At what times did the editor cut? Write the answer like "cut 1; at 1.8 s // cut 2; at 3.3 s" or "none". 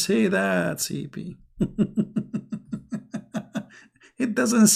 none